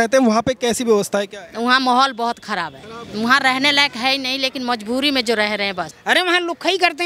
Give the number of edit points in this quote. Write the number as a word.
one